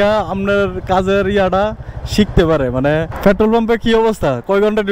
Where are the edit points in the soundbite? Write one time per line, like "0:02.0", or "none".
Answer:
0:03.1